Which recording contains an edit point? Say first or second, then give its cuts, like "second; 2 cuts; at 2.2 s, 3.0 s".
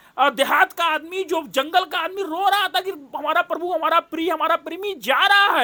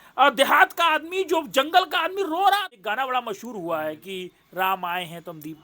second; 1 cut; at 2.7 s